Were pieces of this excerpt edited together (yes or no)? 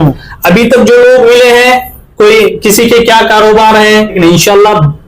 yes